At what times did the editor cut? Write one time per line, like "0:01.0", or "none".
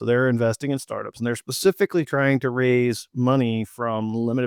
none